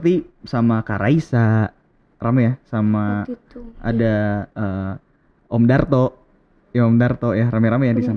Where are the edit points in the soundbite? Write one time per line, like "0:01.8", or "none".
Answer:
0:04.5